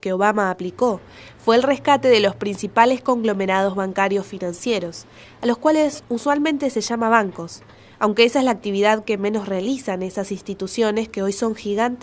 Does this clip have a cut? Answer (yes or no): no